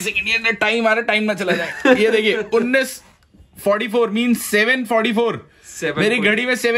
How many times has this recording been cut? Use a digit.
0